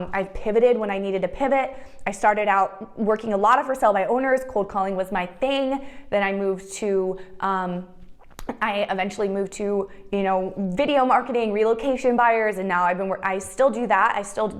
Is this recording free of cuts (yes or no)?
yes